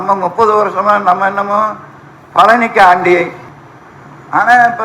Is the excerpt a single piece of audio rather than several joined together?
no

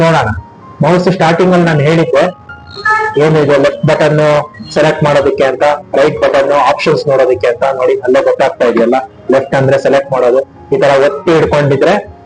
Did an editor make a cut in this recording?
no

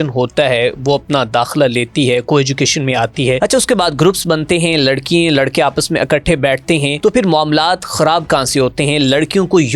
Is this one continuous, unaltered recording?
no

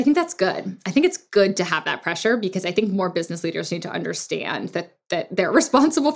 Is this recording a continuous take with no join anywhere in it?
yes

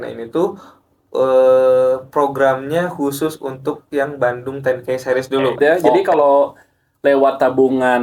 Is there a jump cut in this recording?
yes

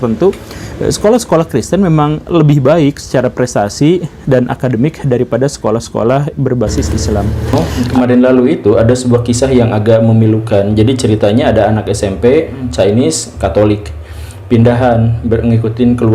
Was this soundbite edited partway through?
yes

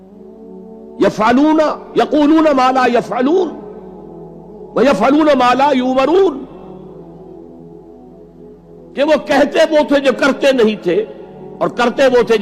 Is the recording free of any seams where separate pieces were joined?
yes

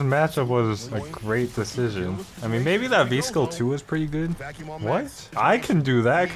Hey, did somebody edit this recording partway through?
yes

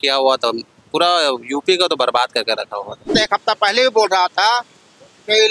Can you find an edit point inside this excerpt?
yes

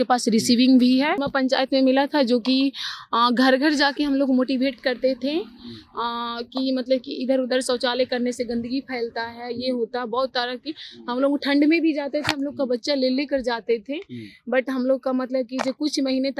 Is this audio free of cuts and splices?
no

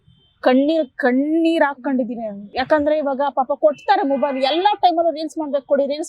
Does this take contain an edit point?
no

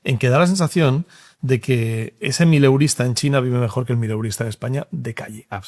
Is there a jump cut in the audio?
no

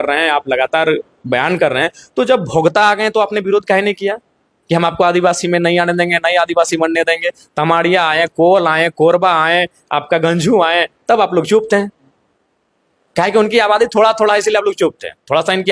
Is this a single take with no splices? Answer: yes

